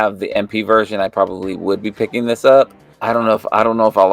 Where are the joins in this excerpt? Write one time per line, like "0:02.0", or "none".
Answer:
0:02.9